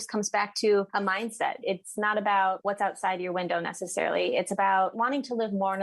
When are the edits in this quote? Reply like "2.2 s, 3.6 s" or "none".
1.4 s, 2.6 s